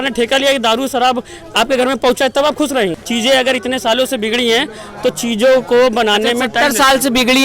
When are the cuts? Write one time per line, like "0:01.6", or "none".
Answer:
0:03.0